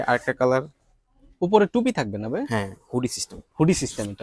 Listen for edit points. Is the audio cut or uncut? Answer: uncut